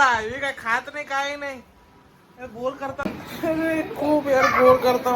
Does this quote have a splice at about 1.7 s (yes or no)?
no